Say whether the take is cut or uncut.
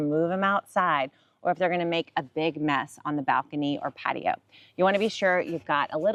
uncut